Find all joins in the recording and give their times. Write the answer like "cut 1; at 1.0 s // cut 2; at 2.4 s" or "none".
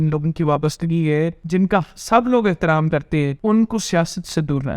cut 1; at 1.4 s // cut 2; at 3.3 s